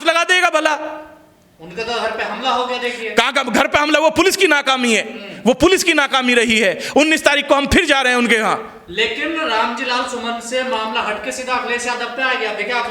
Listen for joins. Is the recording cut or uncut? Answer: uncut